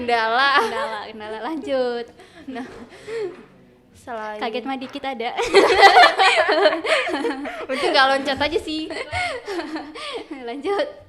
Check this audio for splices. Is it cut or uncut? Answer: uncut